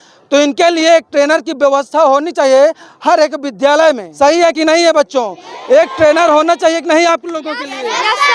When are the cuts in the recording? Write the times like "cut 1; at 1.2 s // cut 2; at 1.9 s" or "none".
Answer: cut 1; at 4.6 s